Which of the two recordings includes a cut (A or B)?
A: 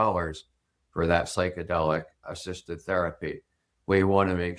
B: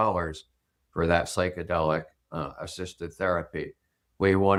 A